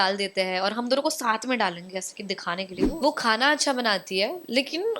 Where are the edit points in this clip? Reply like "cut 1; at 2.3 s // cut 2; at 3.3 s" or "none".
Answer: cut 1; at 2.9 s